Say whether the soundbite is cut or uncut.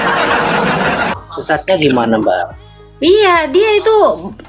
cut